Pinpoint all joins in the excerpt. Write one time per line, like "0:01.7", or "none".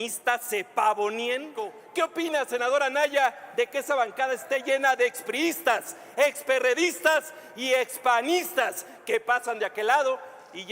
0:01.8